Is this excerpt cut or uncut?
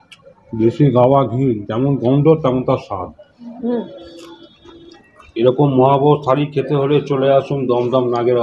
cut